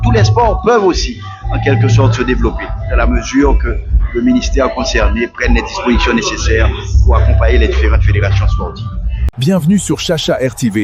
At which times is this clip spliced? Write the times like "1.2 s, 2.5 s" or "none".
9.3 s